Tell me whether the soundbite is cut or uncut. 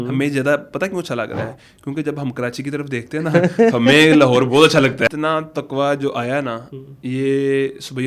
cut